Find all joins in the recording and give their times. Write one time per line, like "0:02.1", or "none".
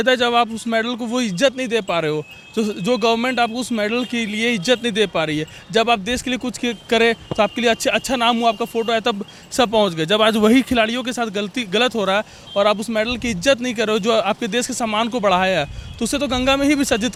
none